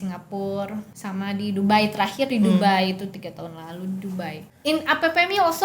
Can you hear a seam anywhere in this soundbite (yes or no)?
yes